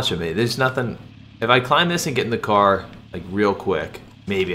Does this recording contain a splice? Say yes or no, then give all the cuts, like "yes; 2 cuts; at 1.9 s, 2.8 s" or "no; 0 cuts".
no; 0 cuts